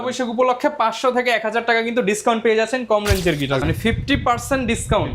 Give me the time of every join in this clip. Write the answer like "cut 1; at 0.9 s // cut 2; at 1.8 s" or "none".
cut 1; at 3.6 s

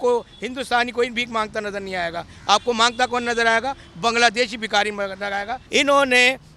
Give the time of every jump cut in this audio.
cut 1; at 5.6 s

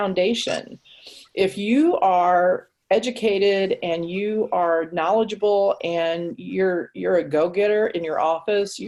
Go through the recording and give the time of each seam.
none

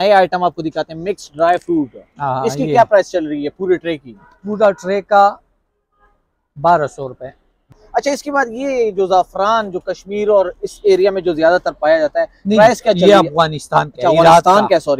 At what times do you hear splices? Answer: cut 1; at 7.7 s

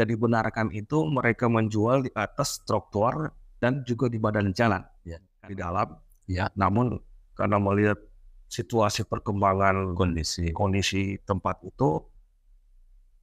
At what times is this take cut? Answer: cut 1; at 5.2 s

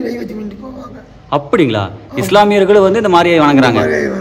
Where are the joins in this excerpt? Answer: none

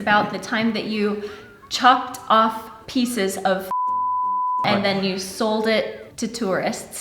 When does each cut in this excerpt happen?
cut 1; at 6.0 s

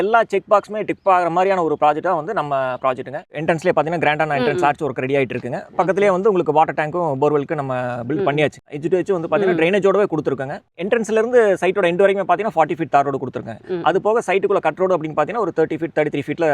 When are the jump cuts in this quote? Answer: cut 1; at 3.4 s // cut 2; at 8.7 s // cut 3; at 10.8 s

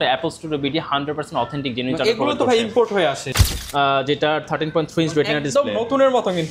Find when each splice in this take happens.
cut 1; at 3.3 s

